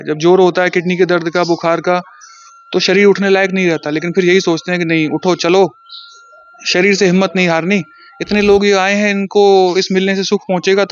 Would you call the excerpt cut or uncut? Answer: uncut